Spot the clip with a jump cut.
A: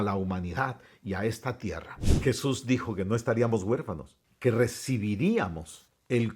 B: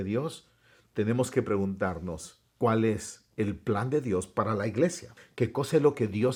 A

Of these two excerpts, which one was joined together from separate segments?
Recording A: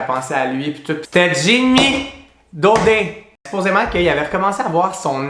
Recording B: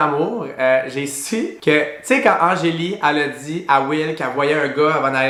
A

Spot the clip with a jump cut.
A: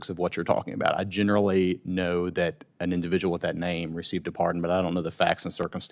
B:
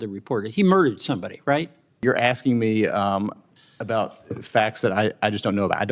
B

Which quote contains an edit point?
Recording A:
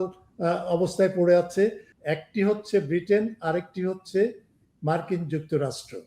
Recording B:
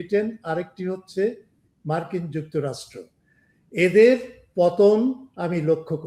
A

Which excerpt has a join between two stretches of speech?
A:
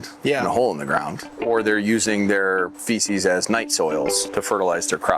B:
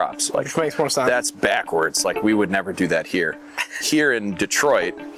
A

